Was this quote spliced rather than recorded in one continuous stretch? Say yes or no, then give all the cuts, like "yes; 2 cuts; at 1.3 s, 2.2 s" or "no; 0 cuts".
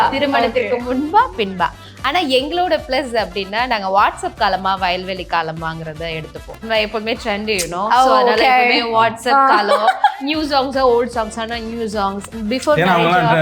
yes; 1 cut; at 6.6 s